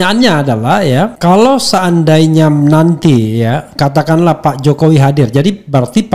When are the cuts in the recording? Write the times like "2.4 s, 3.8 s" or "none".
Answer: 1.1 s